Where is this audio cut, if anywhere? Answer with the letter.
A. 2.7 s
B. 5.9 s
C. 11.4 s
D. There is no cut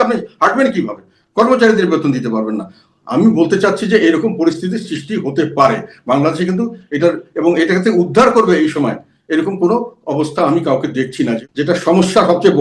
C